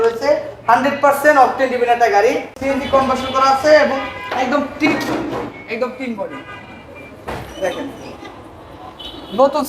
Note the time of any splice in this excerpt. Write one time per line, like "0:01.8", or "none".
0:02.6